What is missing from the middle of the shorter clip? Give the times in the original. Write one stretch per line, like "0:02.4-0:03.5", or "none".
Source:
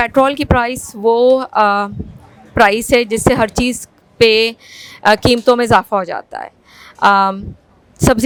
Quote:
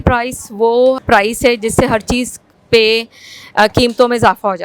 0:01.5-0:02.5